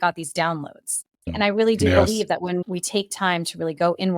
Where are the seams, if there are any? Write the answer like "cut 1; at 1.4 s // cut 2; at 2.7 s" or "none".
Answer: cut 1; at 1.3 s // cut 2; at 2.6 s